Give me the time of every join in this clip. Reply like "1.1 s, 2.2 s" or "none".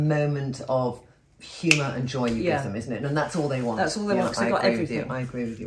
none